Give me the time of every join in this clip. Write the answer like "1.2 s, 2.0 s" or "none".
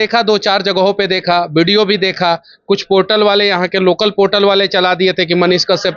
none

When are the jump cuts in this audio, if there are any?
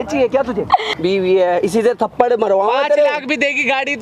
0.9 s

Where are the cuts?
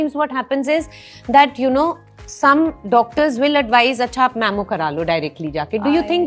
none

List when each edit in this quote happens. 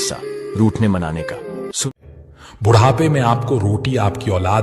2.1 s

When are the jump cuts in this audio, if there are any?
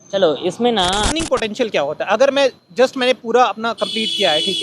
1.1 s

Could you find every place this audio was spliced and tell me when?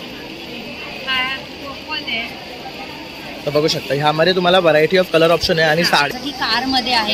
6.1 s

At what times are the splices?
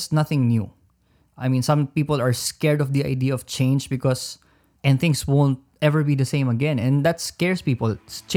4.7 s

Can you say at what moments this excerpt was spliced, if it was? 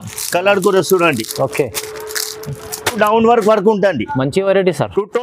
3.0 s

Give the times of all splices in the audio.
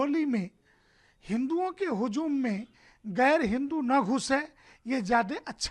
none

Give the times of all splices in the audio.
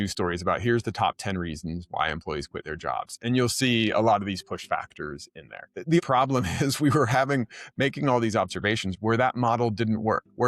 6.0 s, 9.0 s

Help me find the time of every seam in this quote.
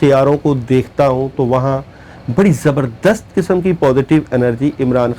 none

